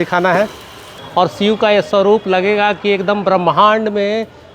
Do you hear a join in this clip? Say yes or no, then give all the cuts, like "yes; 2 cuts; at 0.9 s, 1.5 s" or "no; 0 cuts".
yes; 1 cut; at 1.0 s